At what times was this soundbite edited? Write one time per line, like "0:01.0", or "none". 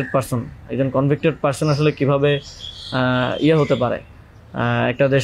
none